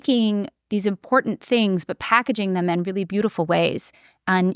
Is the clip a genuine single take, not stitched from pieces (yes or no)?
yes